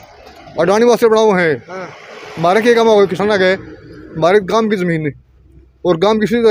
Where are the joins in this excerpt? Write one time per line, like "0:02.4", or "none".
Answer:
none

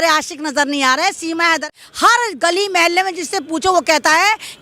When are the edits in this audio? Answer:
0:01.7

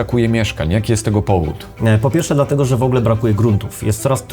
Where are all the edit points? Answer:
0:01.6

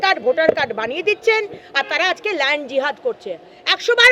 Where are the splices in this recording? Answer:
none

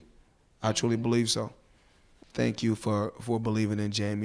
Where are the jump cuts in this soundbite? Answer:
0:02.2

